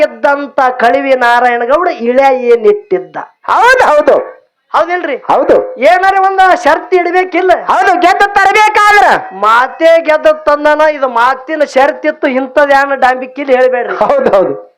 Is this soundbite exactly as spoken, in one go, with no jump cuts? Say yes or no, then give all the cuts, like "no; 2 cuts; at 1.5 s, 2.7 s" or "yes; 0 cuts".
yes; 0 cuts